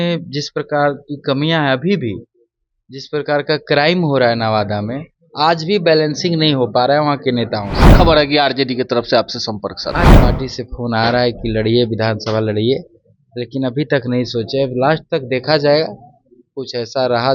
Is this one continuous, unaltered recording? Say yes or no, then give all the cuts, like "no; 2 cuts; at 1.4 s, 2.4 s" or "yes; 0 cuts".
no; 2 cuts; at 7.9 s, 10.1 s